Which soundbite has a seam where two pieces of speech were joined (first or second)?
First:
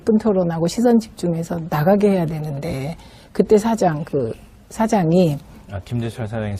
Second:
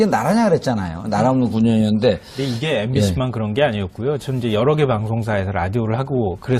second